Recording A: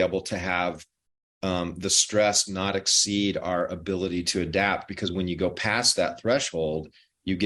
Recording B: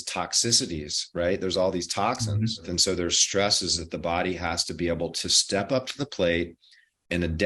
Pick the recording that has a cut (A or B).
B